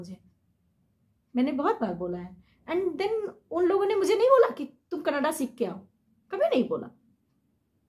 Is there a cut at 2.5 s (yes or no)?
no